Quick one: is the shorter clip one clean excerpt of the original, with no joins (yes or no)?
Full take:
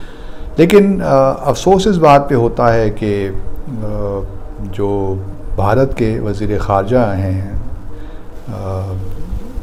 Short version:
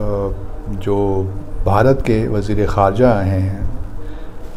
yes